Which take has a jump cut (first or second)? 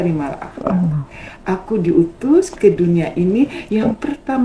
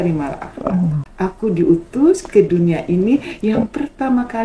second